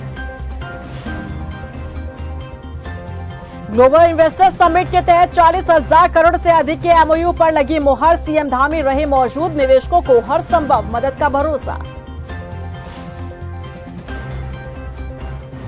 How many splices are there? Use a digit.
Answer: 1